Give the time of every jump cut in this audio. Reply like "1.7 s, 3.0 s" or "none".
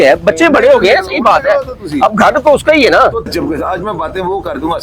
3.3 s